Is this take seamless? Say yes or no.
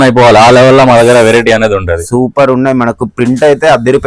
yes